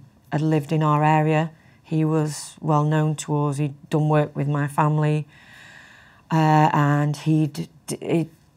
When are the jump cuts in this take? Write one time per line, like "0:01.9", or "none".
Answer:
none